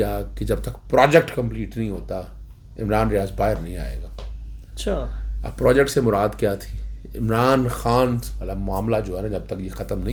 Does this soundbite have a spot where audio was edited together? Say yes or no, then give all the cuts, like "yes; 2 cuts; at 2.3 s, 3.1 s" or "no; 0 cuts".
no; 0 cuts